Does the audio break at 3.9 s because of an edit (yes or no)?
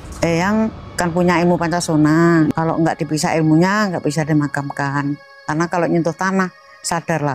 no